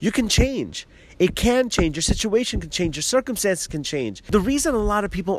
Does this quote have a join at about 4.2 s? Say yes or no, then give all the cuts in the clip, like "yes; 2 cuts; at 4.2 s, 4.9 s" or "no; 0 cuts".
yes; 1 cut; at 4.2 s